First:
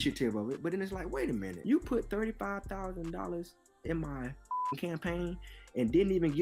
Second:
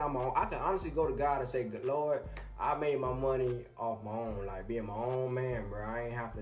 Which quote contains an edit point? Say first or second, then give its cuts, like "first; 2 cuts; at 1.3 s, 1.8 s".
first; 1 cut; at 1.5 s